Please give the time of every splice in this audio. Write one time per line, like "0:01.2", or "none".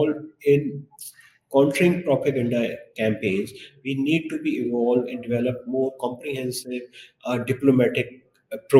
none